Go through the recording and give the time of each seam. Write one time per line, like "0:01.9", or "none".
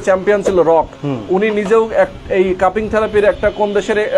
none